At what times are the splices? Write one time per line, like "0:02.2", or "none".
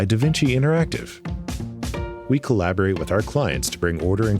0:02.1